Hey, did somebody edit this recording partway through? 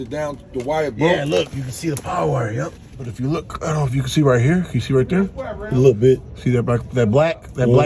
yes; 1 cut; at 3.1 s

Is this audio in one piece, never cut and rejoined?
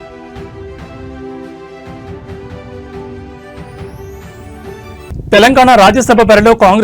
no; 1 cut; at 5.1 s

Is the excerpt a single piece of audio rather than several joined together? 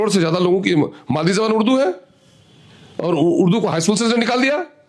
yes; 0 cuts

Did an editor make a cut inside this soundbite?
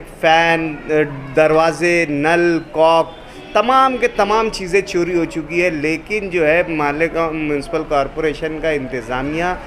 no; 0 cuts

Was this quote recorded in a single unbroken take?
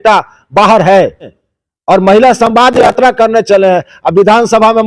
no; 1 cut; at 1.4 s

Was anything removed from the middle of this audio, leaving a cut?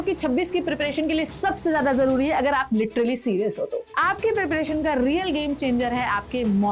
yes; 1 cut; at 3.9 s

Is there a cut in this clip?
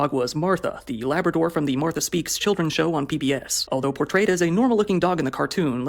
yes; 1 cut; at 3.5 s

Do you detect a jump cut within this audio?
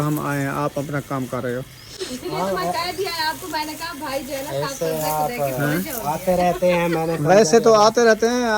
no; 0 cuts

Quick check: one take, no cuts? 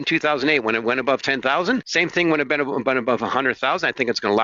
no; 1 cut; at 1.9 s

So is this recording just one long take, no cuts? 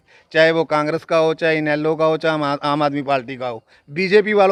yes; 0 cuts

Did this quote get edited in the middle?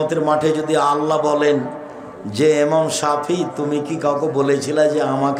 no; 0 cuts

